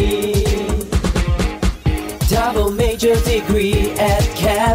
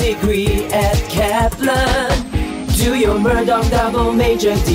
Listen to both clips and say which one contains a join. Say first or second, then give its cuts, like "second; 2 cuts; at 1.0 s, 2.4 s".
first; 1 cut; at 1.4 s